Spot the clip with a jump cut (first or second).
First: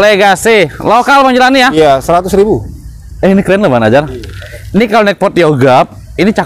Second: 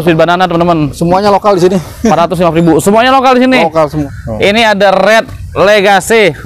second